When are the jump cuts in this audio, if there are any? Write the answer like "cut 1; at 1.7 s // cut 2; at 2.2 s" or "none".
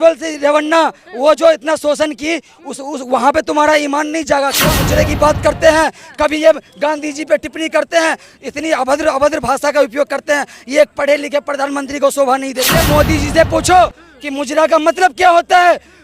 cut 1; at 4.7 s // cut 2; at 12.7 s